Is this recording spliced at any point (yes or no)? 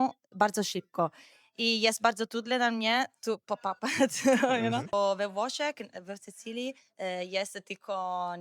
yes